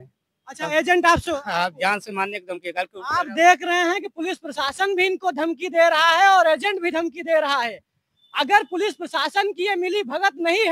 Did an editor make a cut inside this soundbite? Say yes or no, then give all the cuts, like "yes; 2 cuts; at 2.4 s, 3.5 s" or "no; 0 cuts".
no; 0 cuts